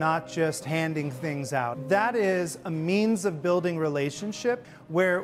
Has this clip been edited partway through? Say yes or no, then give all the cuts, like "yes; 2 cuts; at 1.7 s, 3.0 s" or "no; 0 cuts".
yes; 1 cut; at 1.8 s